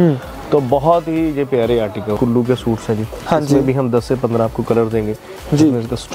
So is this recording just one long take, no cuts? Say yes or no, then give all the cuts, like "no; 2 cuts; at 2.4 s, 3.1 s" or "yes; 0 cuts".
no; 1 cut; at 2.2 s